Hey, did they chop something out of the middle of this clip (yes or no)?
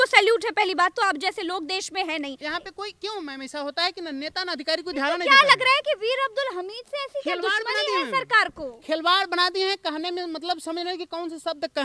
yes